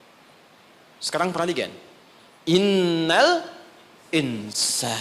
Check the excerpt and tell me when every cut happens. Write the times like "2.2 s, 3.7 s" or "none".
none